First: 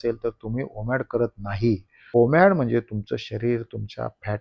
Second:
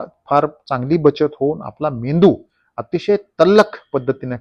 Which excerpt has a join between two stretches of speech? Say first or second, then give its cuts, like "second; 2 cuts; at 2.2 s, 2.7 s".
first; 1 cut; at 2.0 s